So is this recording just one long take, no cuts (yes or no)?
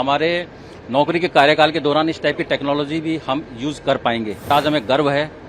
no